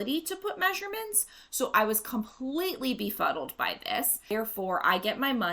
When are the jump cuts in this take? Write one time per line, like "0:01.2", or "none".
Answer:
0:04.2